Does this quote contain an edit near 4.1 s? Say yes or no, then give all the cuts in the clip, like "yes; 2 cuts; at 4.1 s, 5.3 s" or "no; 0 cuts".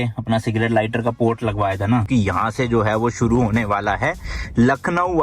no; 1 cut; at 2.1 s